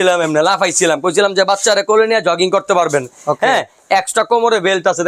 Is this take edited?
no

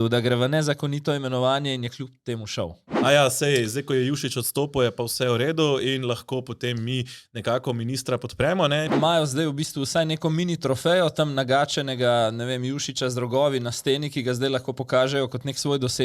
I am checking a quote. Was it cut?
yes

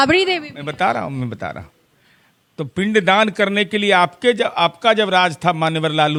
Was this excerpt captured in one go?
yes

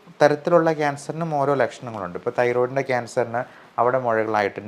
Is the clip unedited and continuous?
yes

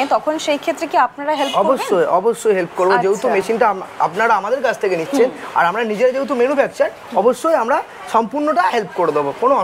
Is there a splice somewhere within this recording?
no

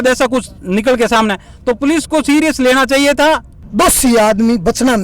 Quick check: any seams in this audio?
yes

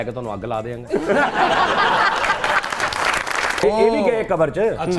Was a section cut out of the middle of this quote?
yes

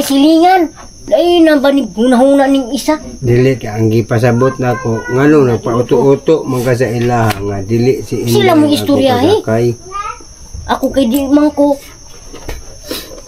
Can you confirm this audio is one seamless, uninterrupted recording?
no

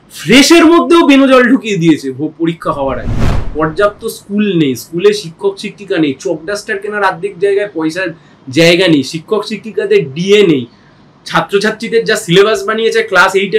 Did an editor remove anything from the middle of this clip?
yes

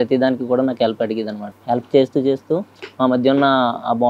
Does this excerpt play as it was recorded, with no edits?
no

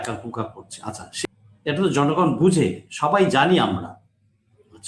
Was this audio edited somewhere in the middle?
yes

